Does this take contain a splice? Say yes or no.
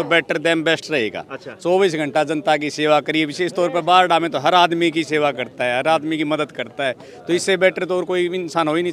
no